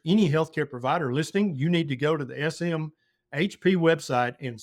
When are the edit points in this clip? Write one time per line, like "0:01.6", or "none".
none